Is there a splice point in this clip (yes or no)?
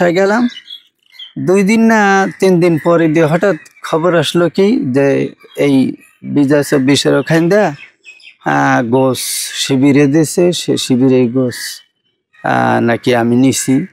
no